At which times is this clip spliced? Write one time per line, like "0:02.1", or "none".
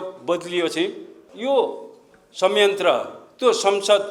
0:01.2